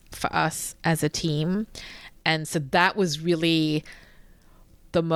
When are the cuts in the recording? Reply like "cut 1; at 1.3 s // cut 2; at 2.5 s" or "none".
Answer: none